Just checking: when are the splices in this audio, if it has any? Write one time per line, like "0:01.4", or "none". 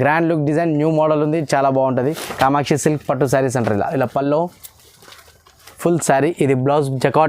0:02.2